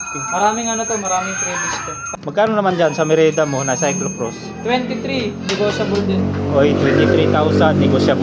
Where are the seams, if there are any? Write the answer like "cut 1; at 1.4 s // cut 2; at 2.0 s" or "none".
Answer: cut 1; at 2.1 s